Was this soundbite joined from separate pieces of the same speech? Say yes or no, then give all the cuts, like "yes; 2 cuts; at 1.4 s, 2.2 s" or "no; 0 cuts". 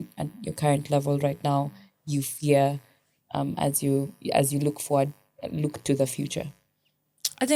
no; 0 cuts